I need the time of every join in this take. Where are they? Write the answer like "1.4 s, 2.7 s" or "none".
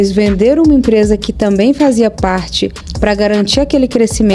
none